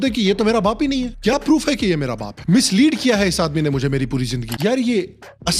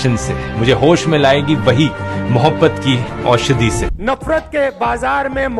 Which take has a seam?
first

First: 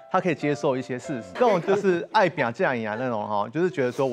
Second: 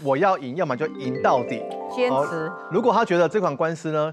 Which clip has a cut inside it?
first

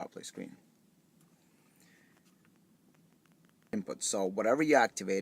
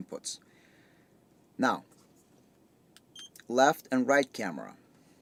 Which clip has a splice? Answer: first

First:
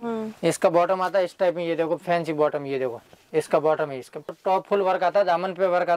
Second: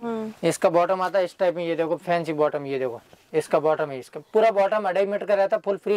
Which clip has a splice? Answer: first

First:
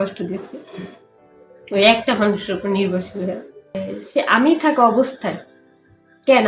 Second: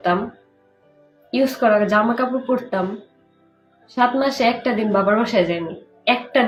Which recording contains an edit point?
first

